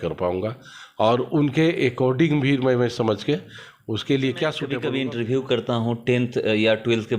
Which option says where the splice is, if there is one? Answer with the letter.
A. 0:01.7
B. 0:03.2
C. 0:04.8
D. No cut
C